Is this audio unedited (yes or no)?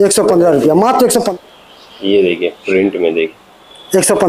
no